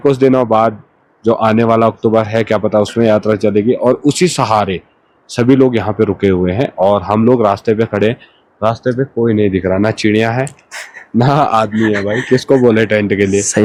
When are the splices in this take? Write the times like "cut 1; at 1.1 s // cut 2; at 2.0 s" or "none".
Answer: none